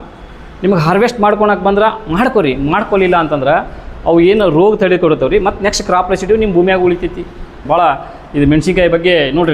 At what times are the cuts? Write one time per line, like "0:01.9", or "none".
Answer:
0:07.6